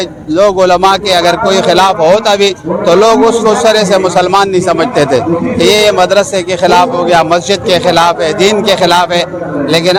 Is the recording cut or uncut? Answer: uncut